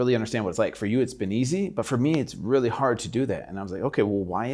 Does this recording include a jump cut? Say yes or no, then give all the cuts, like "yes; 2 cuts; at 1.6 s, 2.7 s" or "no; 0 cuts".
no; 0 cuts